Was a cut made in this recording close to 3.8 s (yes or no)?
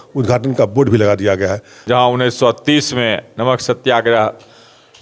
no